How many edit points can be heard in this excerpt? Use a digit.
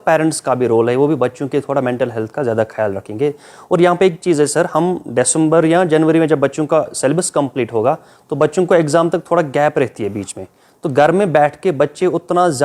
0